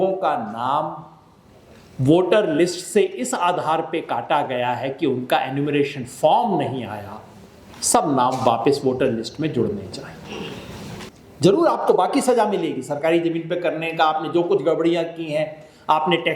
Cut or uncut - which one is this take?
cut